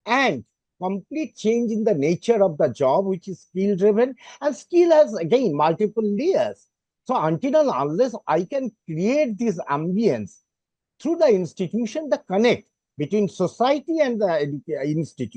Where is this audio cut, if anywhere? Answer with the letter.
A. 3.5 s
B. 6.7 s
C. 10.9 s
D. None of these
D